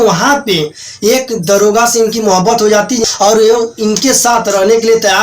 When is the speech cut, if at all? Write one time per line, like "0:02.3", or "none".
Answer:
0:03.0